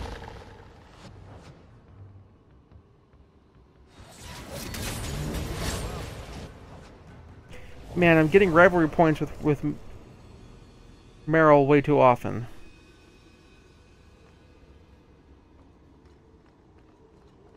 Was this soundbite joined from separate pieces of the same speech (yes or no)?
no